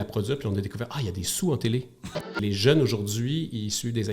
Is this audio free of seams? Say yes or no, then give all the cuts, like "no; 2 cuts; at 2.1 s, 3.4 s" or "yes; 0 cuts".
no; 1 cut; at 2.3 s